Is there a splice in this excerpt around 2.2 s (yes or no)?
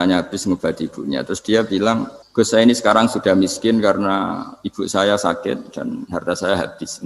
yes